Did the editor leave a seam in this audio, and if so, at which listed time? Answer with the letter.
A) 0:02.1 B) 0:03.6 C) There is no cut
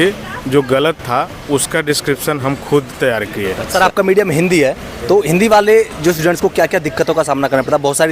B